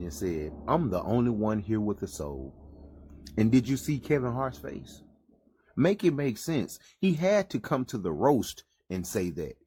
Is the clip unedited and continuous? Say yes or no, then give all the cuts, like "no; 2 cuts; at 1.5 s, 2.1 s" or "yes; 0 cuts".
yes; 0 cuts